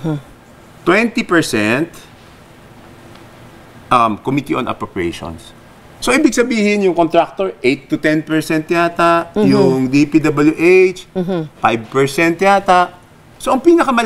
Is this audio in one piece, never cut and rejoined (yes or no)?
yes